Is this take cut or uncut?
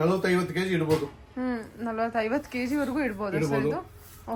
uncut